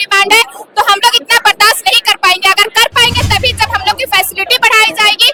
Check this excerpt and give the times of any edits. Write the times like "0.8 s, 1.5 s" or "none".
none